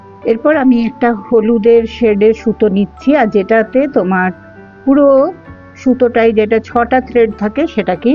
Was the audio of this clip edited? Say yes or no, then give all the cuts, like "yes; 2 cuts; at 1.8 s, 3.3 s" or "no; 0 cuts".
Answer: no; 0 cuts